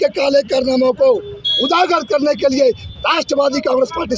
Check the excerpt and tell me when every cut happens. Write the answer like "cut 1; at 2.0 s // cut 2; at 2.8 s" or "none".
none